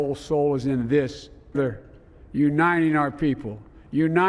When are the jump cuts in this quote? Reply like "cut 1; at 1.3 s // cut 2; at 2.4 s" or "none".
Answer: cut 1; at 1.5 s